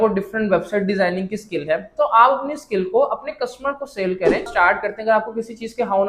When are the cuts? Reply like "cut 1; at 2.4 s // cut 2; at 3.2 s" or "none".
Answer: cut 1; at 4.5 s